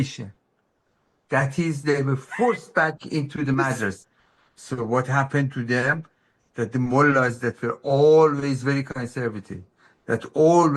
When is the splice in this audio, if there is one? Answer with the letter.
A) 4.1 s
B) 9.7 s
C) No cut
A